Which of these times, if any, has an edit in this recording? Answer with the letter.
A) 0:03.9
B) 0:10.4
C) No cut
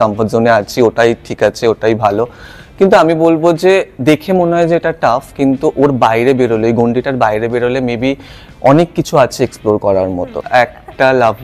B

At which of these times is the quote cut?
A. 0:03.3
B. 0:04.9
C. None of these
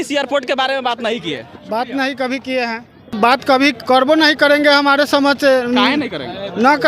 A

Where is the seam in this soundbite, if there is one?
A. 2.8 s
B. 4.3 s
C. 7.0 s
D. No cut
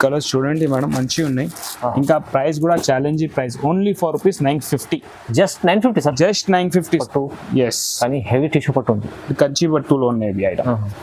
C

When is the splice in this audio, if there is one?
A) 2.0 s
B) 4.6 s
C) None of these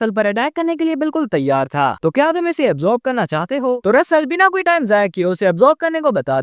A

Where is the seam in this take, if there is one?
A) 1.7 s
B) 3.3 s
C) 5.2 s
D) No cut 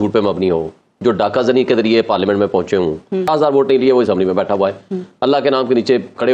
B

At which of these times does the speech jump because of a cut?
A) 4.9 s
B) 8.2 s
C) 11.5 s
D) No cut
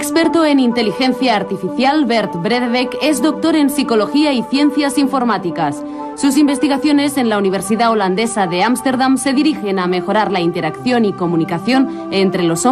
D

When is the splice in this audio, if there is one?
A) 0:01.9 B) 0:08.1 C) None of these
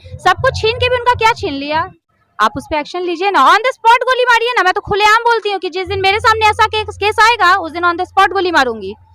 A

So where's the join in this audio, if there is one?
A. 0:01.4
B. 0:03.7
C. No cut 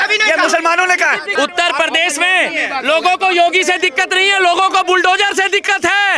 A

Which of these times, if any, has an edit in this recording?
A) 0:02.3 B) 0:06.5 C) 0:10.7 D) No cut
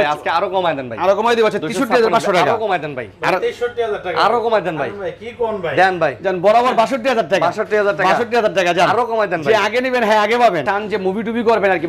C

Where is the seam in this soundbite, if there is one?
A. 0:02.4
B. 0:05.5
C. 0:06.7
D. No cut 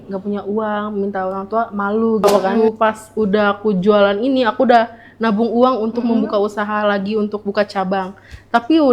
A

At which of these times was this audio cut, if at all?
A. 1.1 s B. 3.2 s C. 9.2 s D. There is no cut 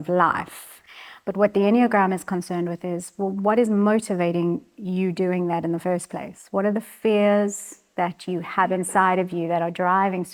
D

